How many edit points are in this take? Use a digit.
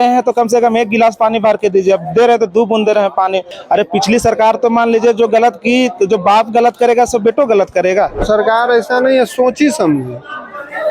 2